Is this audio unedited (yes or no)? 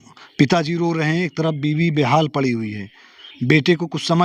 yes